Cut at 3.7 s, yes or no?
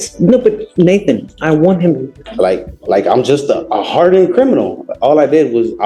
no